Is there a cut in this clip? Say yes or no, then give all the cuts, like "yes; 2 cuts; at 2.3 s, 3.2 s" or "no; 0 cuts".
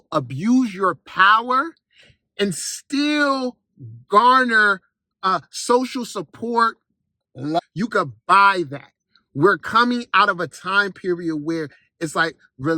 yes; 1 cut; at 7.6 s